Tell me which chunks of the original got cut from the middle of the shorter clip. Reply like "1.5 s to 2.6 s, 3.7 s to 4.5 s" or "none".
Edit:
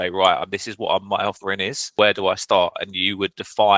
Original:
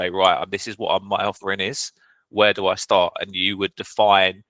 1.8 s to 2.2 s